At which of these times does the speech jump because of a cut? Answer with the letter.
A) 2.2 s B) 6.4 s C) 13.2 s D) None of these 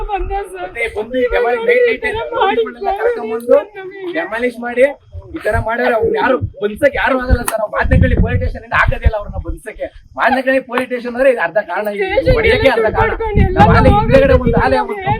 B